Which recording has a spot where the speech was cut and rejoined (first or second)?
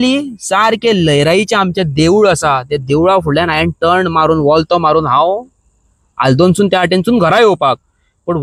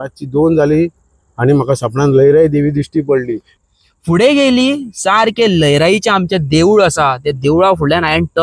second